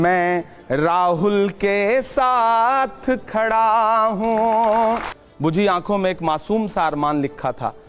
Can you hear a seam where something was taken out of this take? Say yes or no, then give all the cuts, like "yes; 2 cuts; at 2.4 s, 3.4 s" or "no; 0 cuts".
yes; 1 cut; at 5.2 s